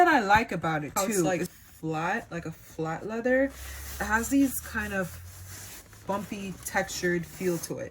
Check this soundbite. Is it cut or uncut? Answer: cut